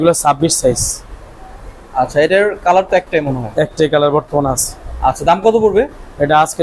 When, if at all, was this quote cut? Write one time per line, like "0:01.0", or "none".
none